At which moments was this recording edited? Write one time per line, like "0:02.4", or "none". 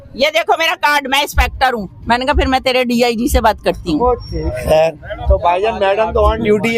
none

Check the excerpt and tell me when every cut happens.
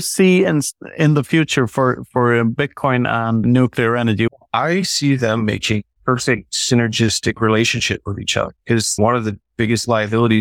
0:03.4
0:04.3
0:06.4
0:09.0

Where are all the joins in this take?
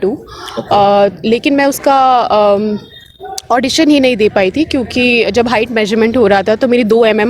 none

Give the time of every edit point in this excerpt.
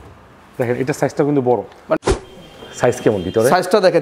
0:02.0

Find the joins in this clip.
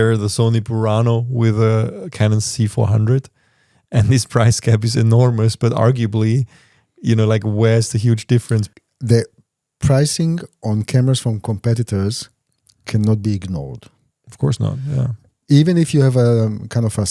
0:08.7

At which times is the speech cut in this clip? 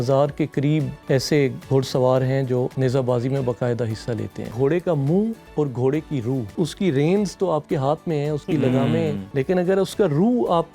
0:01.0
0:02.7
0:04.5
0:05.4
0:06.5
0:09.2

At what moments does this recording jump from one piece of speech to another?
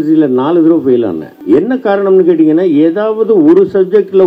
0:01.3

